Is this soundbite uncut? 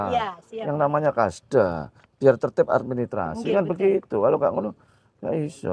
yes; 0 cuts

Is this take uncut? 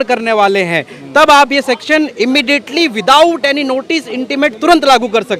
yes; 0 cuts

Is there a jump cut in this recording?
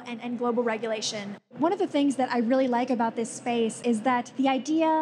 yes; 1 cut; at 1.5 s

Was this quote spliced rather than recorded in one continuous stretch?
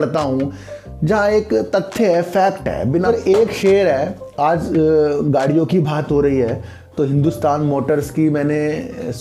yes; 1 cut; at 3.0 s

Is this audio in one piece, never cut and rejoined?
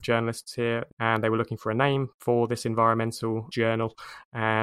no; 3 cuts; at 0.9 s, 2.1 s, 3.5 s

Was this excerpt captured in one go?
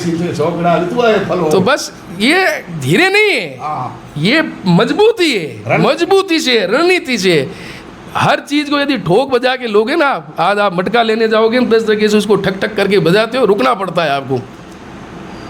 yes; 0 cuts

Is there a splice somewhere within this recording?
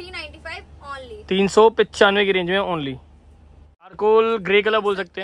no; 0 cuts

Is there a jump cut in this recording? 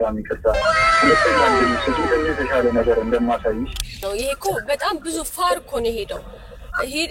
yes; 1 cut; at 3.9 s

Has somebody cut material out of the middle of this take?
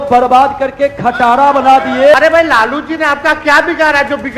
yes; 1 cut; at 2.1 s

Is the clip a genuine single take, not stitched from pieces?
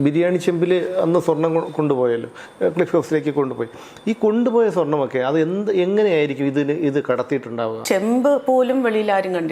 no; 1 cut; at 7.8 s

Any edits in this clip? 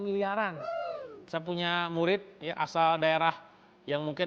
no; 0 cuts

